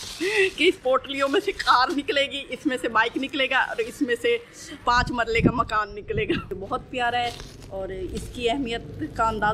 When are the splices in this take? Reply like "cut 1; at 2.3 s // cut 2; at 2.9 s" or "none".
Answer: cut 1; at 6.5 s